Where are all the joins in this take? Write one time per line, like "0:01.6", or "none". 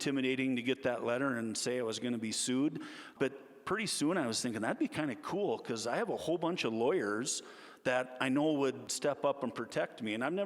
0:03.1
0:08.9